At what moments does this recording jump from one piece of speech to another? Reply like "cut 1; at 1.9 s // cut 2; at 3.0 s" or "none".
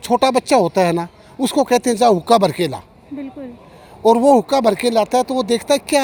none